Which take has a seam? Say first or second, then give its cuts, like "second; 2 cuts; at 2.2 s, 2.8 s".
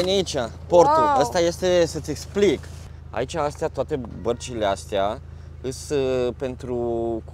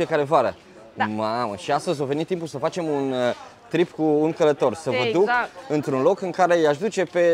first; 1 cut; at 2.8 s